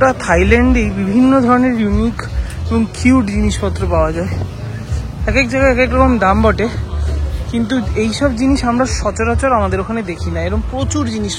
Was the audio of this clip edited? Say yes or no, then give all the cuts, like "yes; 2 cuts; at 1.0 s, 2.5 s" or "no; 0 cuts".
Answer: no; 0 cuts